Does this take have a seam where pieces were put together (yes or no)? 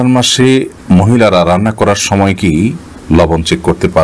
no